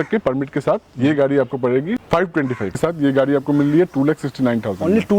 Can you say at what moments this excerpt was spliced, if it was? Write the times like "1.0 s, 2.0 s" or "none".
2.8 s